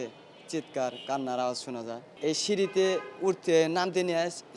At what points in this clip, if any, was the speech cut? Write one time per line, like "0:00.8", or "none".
0:02.1